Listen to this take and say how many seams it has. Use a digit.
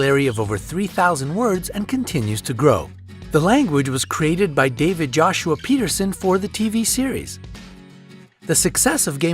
1